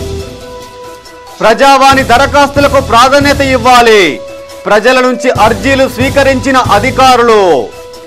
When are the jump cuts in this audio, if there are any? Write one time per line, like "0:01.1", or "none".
none